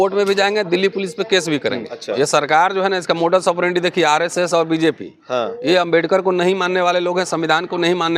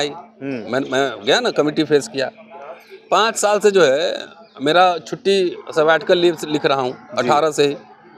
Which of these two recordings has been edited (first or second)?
first